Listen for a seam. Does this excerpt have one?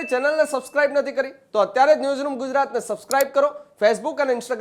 no; 0 cuts

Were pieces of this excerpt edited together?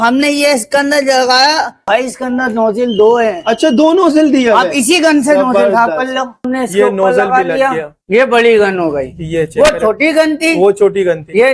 yes; 3 cuts; at 1.9 s, 6.5 s, 7.9 s

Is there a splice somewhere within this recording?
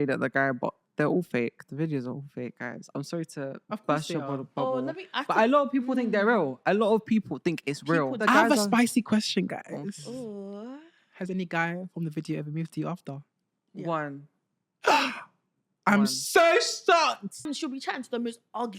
yes; 2 cuts; at 8.2 s, 17.4 s

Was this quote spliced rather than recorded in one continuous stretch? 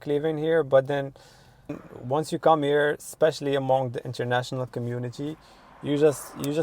yes; 1 cut; at 1.9 s

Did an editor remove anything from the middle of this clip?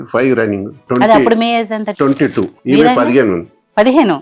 yes; 2 cuts; at 0.8 s, 2.0 s

